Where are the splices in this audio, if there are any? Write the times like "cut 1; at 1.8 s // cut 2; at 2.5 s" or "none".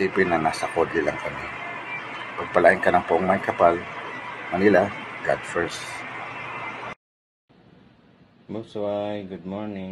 cut 1; at 7.2 s